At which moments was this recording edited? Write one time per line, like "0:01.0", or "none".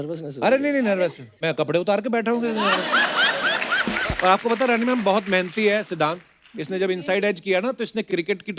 0:04.0